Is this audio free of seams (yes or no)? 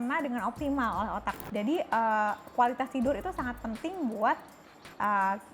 no